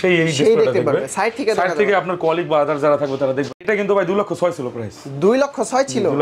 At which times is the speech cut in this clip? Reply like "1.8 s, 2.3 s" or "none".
3.5 s